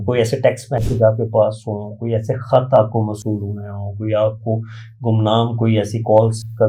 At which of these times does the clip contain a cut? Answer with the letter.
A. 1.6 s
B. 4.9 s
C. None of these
C